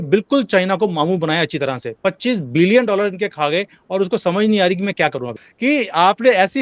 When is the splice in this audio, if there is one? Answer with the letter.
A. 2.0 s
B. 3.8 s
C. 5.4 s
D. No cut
C